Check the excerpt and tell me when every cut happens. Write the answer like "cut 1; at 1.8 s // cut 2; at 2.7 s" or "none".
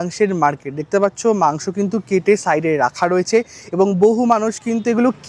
none